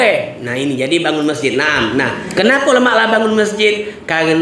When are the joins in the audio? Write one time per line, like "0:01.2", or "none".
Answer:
0:02.2